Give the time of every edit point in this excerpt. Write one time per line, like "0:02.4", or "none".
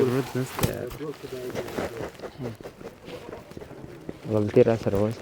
none